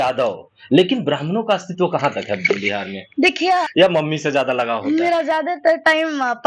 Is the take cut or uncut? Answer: cut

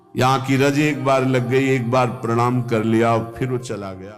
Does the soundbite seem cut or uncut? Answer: uncut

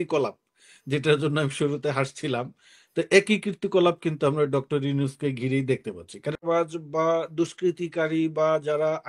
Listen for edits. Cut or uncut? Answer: cut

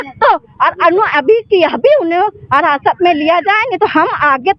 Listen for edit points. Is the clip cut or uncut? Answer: uncut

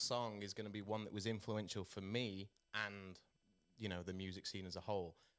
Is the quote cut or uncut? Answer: uncut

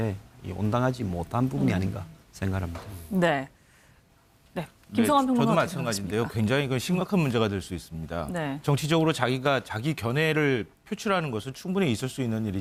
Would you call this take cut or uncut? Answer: uncut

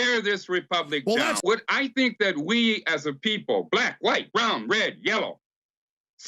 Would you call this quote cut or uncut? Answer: cut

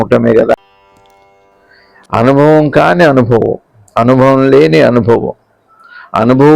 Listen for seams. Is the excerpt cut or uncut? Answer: cut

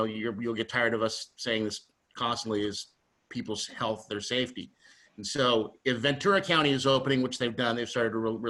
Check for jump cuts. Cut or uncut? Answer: uncut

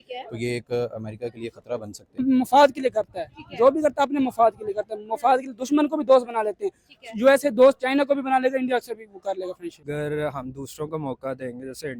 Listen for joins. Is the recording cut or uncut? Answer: cut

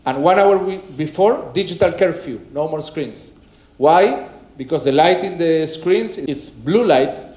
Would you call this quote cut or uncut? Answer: cut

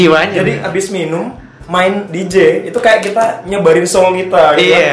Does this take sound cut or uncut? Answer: uncut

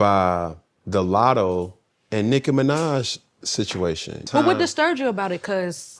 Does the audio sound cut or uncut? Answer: cut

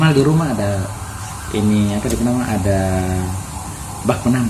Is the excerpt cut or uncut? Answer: uncut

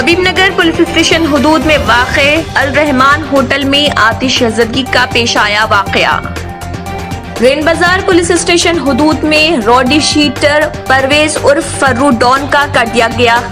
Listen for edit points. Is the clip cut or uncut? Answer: uncut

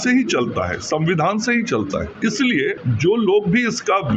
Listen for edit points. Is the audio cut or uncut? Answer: cut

